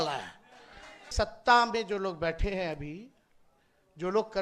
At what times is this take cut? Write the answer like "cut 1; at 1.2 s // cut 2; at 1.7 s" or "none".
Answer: cut 1; at 1.1 s